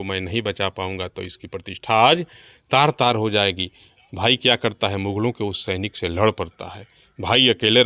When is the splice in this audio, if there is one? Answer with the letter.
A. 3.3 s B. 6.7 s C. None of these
C